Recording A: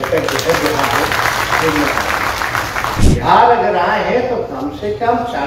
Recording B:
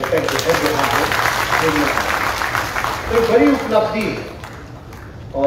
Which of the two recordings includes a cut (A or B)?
A